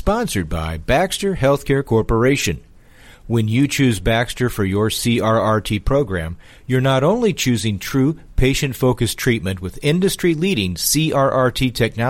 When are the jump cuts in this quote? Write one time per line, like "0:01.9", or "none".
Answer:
none